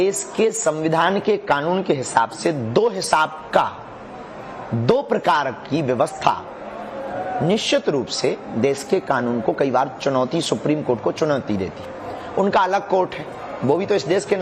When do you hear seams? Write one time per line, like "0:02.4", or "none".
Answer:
0:10.8